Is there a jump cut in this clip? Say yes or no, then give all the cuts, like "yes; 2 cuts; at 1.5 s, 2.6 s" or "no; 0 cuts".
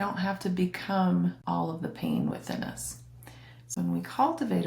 yes; 2 cuts; at 1.4 s, 3.7 s